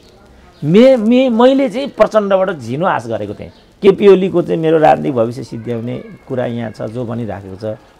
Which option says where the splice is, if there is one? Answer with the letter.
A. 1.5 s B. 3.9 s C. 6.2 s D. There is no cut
B